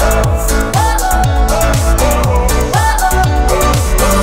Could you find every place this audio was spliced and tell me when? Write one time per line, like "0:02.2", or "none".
none